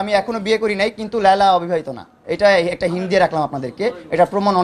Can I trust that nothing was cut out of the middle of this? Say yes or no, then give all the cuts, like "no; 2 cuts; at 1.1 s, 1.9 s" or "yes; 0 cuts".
yes; 0 cuts